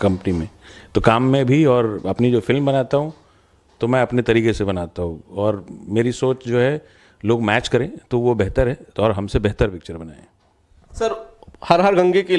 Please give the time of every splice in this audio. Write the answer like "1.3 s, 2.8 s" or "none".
none